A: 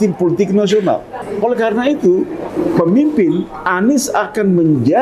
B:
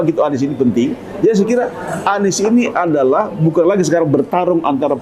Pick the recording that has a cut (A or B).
A